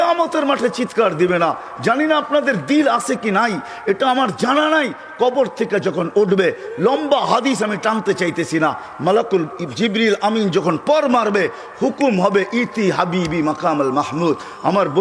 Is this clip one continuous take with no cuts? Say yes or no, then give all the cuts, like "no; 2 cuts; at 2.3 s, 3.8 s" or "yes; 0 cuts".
yes; 0 cuts